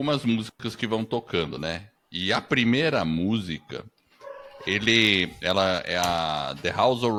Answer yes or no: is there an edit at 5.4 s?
no